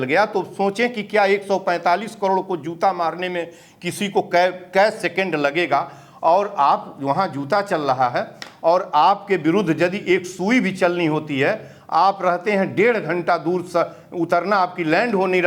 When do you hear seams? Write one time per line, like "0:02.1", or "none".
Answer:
none